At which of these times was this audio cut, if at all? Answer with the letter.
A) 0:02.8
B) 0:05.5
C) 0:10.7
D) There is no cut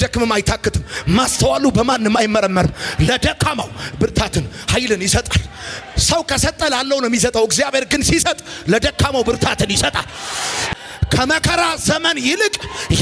C